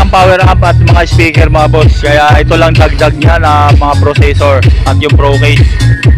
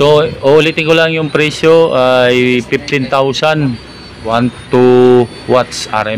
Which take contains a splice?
second; 1 cut; at 4.3 s

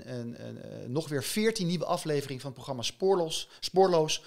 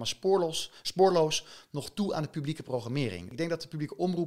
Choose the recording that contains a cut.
second; 1 cut; at 3.2 s

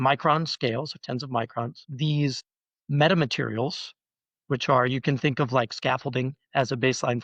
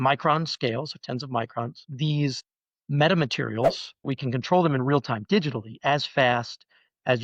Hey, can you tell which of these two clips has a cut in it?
second; 1 cut; at 4.1 s

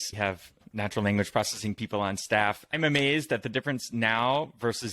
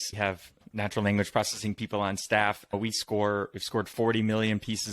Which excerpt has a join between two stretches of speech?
second; 1 cut; at 2.7 s

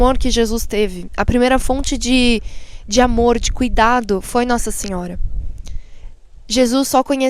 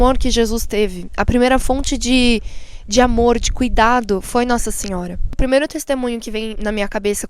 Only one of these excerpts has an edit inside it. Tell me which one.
second; 1 cut; at 5.4 s

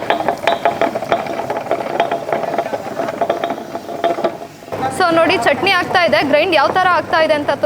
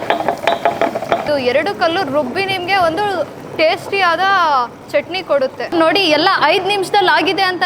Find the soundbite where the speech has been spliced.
second; 2 cuts; at 1.2 s, 5.7 s

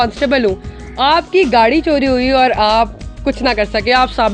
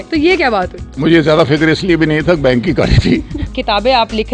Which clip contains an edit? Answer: second; 2 cuts; at 0.9 s, 3.4 s

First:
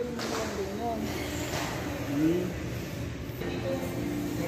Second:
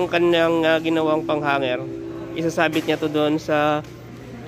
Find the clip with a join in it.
first; 1 cut; at 3.4 s

